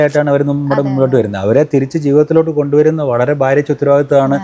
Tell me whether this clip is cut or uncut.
uncut